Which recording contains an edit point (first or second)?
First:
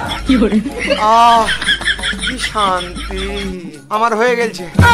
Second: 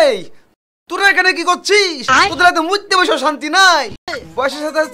second